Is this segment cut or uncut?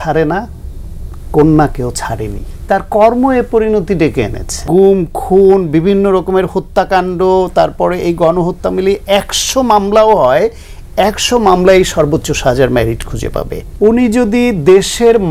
cut